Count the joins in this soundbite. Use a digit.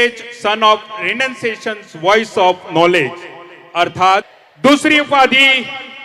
1